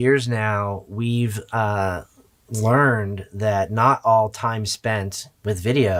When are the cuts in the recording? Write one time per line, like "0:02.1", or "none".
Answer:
none